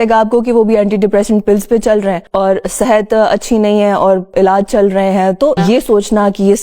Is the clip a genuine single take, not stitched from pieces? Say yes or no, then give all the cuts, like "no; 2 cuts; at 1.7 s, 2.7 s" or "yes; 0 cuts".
no; 1 cut; at 5.6 s